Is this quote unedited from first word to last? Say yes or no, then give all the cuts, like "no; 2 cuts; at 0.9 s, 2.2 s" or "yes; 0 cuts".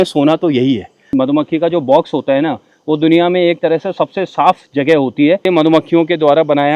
no; 2 cuts; at 1.0 s, 5.4 s